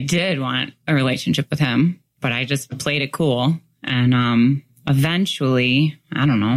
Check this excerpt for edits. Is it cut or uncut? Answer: uncut